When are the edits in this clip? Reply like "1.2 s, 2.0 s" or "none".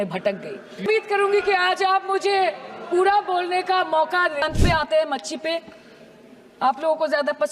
0.8 s, 4.4 s